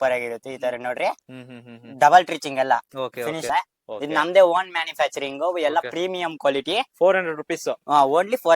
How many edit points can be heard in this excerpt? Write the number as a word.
one